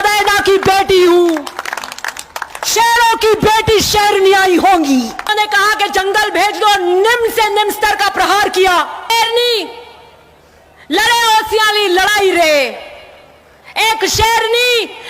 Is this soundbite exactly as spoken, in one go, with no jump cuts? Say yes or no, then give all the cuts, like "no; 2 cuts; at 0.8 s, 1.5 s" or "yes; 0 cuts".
no; 2 cuts; at 5.3 s, 9.1 s